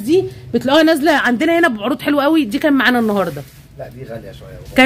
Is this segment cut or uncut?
uncut